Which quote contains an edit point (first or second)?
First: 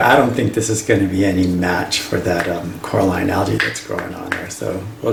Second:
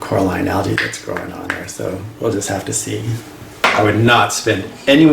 second